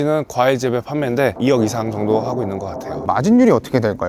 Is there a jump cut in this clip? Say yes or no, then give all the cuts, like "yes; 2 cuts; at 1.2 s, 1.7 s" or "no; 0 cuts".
yes; 2 cuts; at 1.3 s, 3.1 s